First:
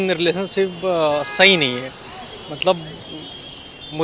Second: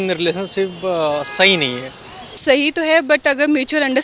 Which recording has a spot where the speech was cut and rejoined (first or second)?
second